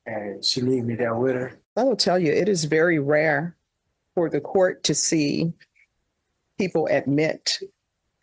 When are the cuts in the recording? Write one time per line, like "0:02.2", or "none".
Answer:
0:01.6